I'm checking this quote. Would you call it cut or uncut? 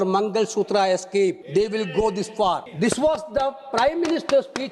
cut